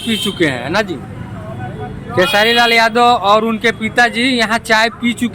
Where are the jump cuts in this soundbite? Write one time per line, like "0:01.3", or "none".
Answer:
none

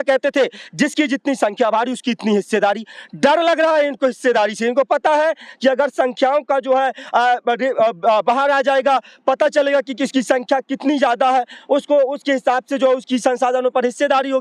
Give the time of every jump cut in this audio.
none

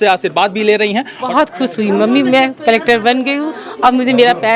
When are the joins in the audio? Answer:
0:01.3

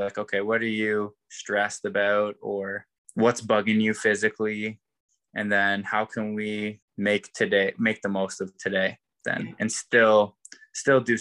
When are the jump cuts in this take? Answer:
0:03.0
0:06.8

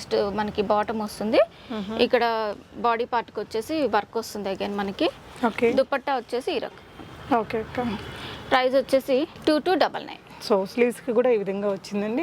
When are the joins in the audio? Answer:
none

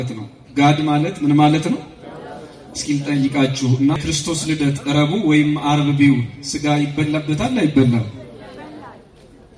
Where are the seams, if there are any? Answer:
0:04.0

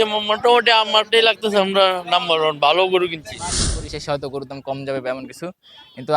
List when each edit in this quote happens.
0:03.6

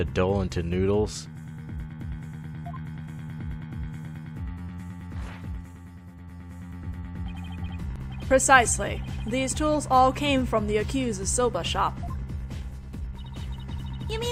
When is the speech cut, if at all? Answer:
none

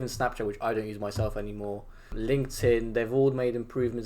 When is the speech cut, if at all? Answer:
0:02.1

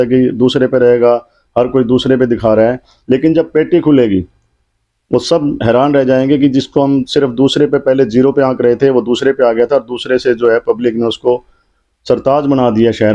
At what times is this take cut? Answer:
none

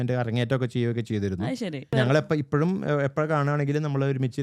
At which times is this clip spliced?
0:01.9

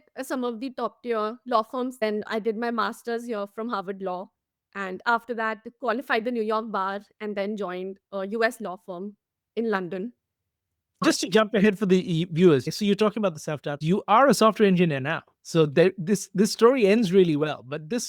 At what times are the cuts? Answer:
0:02.0
0:11.0
0:12.7
0:13.8

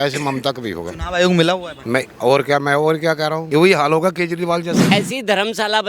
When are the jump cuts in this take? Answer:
0:01.7
0:03.4
0:04.9

